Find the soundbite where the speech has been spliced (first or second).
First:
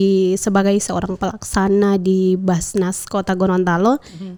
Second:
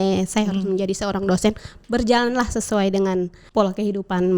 second